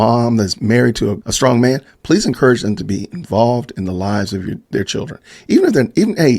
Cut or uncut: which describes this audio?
cut